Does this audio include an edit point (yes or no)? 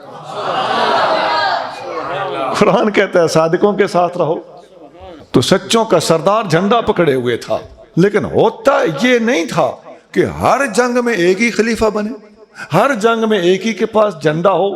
yes